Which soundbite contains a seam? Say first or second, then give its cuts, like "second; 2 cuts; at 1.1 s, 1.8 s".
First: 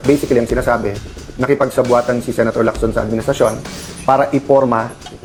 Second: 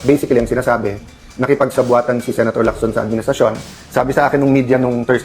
second; 1 cut; at 3.8 s